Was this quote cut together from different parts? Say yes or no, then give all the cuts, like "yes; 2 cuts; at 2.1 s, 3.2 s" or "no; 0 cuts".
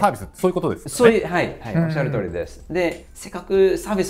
no; 0 cuts